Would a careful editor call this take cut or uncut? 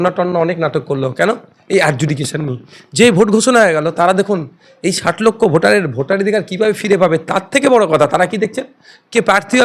uncut